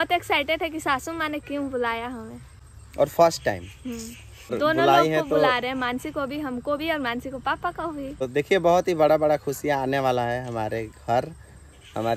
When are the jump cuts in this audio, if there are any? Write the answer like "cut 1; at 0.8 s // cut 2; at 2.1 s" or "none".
cut 1; at 2.6 s // cut 2; at 4.6 s // cut 3; at 8.3 s